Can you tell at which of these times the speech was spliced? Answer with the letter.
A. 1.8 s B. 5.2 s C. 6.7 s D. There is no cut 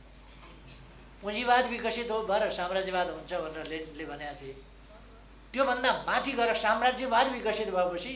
D